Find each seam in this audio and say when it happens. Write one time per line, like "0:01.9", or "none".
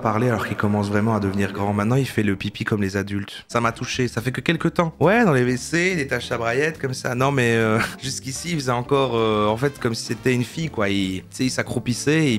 0:04.9